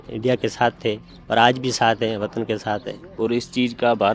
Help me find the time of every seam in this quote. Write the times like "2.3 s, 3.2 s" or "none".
3.0 s